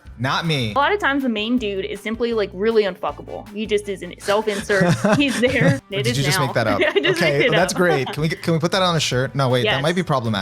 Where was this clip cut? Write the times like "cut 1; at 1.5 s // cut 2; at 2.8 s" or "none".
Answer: cut 1; at 0.7 s // cut 2; at 5.9 s